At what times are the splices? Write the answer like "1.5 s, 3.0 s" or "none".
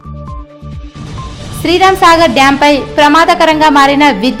1.0 s

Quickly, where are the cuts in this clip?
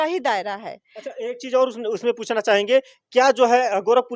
none

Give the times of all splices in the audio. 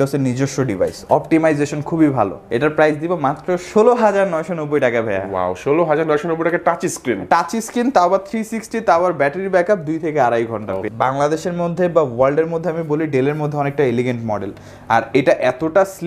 2.4 s, 10.9 s

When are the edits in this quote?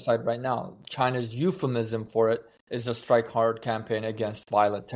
none

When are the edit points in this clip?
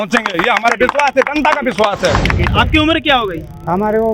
2.5 s

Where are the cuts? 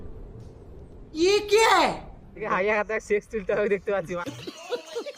2.5 s, 4.0 s

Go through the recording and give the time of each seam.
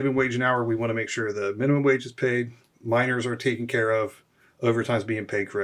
none

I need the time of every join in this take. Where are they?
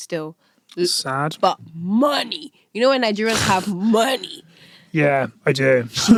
none

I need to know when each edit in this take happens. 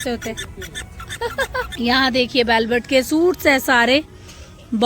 1.7 s

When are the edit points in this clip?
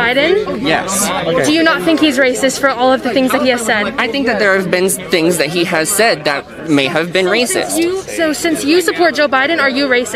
none

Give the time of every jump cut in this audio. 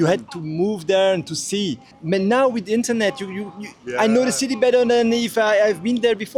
none

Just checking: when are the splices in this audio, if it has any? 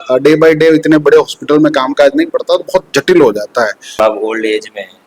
4.0 s

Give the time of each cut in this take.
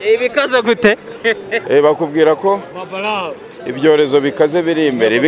none

